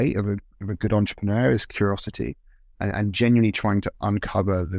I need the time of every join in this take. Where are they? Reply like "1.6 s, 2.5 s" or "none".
none

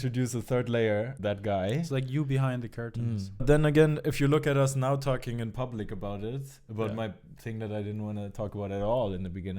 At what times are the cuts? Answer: 1.1 s, 3.4 s

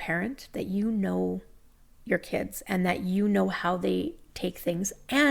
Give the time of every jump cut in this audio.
none

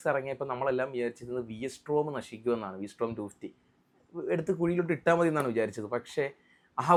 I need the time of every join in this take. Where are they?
none

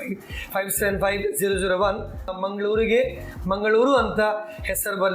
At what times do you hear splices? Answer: 2.4 s

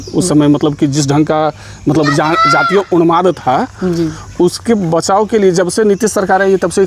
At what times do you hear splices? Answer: none

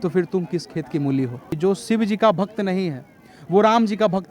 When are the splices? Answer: 1.5 s

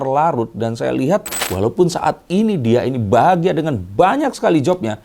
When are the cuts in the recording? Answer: 1.4 s

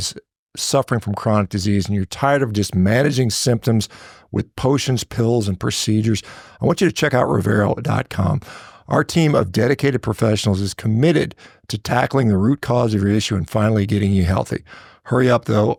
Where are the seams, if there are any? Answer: none

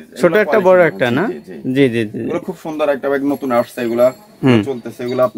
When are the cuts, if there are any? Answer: none

